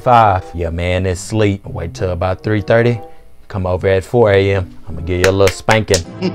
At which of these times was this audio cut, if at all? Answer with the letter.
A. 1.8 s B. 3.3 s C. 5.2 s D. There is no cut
A